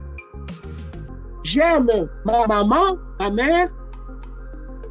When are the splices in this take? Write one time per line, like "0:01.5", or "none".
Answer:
0:01.4